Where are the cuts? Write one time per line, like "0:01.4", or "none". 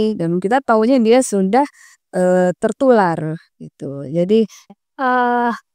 0:04.7